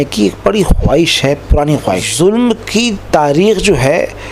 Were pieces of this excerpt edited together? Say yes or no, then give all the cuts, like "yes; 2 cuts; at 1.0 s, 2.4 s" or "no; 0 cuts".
yes; 1 cut; at 2.1 s